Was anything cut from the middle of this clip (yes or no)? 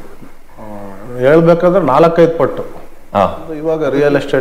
yes